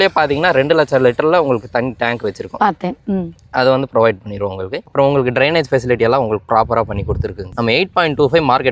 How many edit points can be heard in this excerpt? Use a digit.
1